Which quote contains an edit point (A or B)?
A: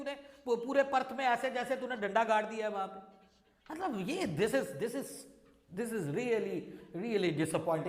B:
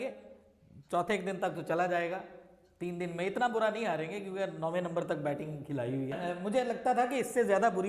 B